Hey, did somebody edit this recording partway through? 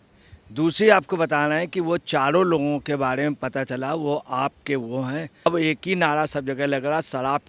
yes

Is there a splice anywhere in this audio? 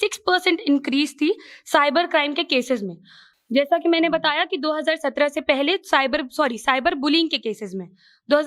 no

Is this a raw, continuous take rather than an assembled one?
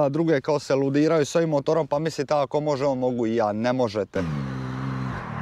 no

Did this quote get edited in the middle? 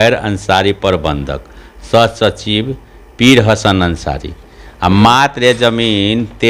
no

